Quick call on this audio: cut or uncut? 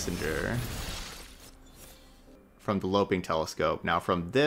cut